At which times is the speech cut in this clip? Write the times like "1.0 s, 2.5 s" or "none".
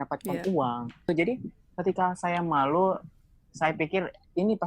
1.1 s